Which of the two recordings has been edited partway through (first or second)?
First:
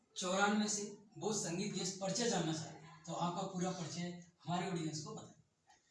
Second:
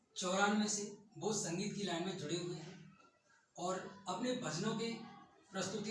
first